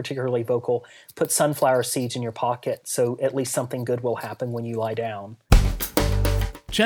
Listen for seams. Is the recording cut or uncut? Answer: cut